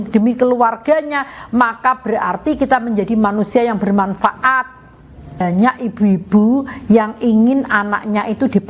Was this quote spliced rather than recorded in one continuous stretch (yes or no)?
yes